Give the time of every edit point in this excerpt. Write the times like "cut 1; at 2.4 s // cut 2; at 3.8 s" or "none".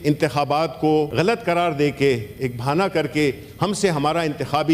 cut 1; at 1.1 s